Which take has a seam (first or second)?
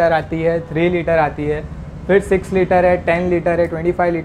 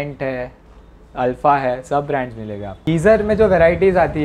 second